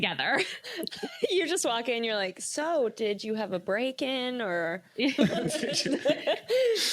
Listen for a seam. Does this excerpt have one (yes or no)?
no